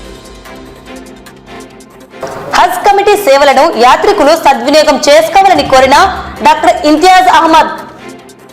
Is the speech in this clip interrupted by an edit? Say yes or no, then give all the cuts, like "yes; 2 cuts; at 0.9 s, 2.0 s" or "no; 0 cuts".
no; 0 cuts